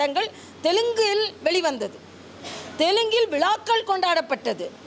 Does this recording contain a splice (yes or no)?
no